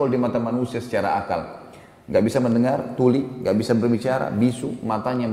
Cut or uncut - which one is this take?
uncut